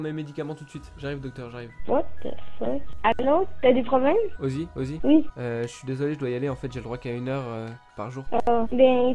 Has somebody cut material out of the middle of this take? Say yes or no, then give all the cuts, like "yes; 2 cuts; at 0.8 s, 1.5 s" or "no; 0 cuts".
yes; 1 cut; at 1.8 s